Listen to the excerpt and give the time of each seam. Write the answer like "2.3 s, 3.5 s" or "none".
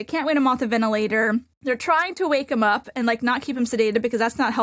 1.5 s

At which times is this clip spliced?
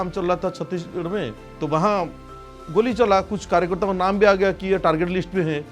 1.4 s

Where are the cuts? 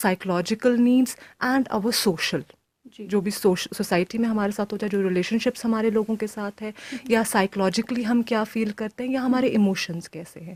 none

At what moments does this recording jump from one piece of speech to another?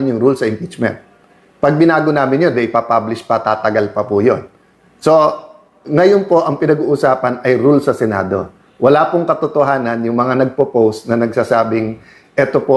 none

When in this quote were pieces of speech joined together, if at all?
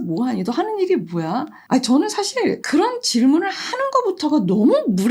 1.6 s

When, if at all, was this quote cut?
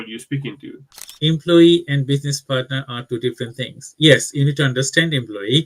1.1 s

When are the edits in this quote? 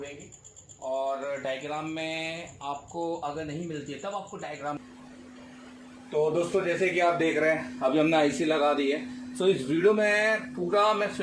4.8 s

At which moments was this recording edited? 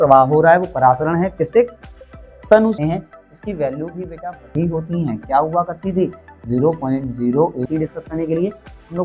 2.8 s, 7.7 s

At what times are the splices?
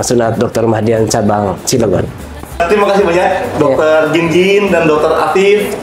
none

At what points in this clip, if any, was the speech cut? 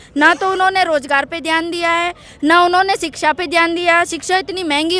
none

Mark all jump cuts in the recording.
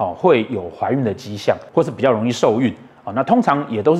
1.6 s

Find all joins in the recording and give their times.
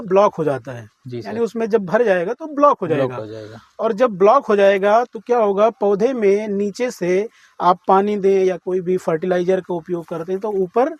none

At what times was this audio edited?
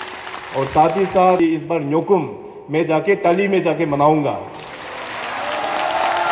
1.4 s

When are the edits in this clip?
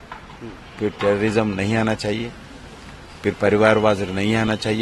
none

